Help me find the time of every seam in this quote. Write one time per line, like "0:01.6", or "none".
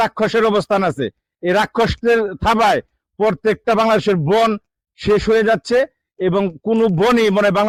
none